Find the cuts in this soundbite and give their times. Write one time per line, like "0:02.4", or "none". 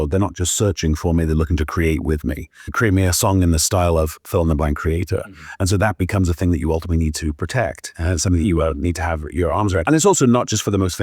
0:02.6
0:09.8